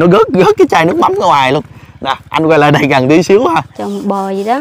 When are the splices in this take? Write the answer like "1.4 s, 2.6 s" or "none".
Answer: 3.5 s